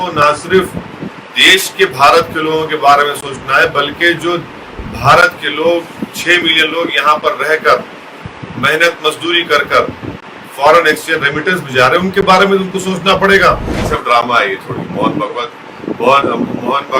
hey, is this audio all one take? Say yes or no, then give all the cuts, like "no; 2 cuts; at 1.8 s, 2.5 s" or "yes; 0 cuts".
no; 1 cut; at 13.7 s